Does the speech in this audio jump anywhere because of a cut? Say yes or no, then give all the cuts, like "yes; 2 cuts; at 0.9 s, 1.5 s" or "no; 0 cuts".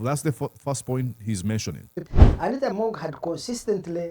yes; 1 cut; at 2.0 s